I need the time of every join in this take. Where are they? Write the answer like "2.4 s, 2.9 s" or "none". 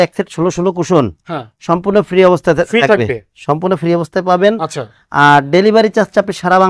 none